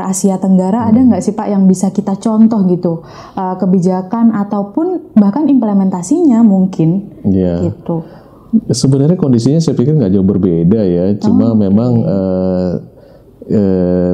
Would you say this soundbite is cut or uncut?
uncut